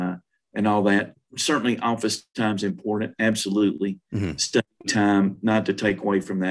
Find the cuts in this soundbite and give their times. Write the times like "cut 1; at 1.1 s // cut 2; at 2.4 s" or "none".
none